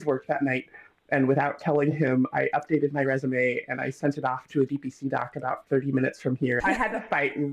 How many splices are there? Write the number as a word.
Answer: one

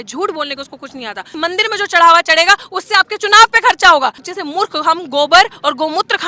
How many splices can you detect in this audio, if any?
two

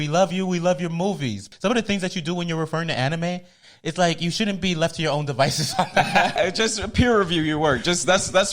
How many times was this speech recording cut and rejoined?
two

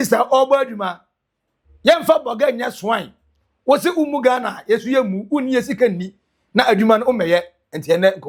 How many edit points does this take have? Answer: zero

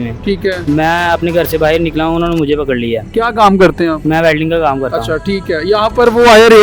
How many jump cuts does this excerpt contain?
zero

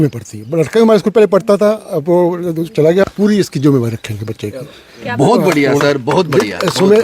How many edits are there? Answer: one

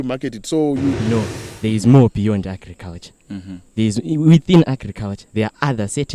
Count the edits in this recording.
one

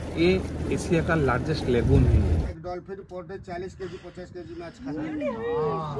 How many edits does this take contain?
one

